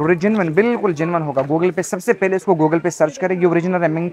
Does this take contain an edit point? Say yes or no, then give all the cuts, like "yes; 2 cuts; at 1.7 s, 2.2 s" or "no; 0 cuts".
no; 0 cuts